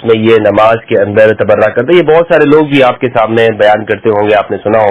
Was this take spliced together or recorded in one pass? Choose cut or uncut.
uncut